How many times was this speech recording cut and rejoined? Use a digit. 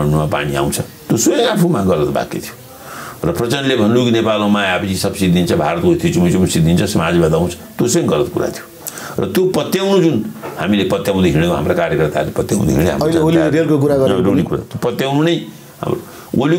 0